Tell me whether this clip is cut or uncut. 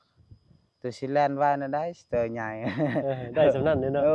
uncut